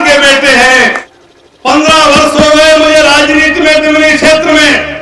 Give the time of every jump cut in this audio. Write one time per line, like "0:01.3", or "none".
0:01.0